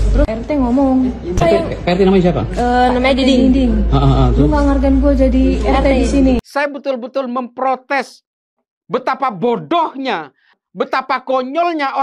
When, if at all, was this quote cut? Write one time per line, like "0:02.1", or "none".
0:06.4
0:10.6